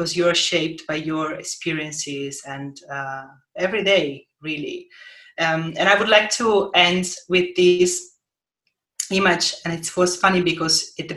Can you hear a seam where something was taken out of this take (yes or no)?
no